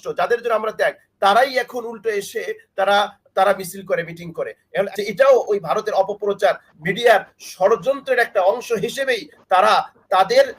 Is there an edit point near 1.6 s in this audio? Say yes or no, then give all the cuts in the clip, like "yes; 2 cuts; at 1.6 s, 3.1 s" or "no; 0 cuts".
no; 1 cut; at 4.9 s